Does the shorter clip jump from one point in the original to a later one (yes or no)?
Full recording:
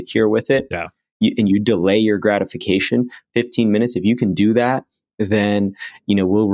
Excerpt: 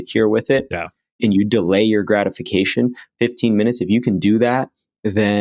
yes